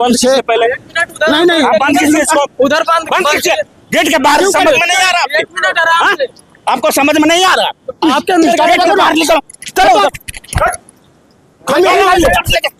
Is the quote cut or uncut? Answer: uncut